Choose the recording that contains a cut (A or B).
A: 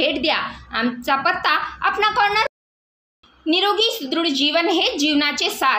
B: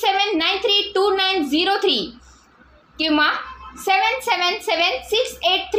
A